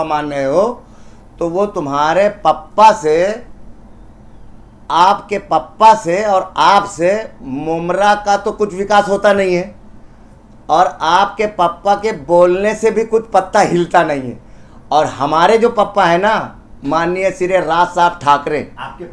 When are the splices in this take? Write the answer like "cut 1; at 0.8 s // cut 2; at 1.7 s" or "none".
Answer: none